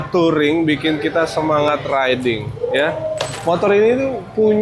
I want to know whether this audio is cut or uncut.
cut